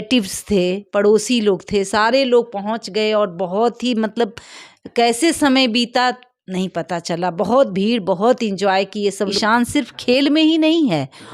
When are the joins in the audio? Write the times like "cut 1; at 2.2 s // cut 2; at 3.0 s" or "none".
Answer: cut 1; at 9.3 s